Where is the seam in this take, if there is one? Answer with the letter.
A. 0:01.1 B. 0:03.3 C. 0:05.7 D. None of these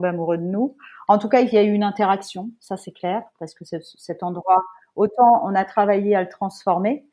D